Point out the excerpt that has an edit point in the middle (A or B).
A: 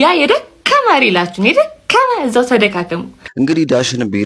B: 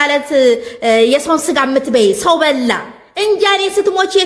A